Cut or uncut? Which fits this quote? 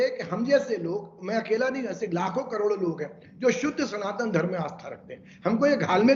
uncut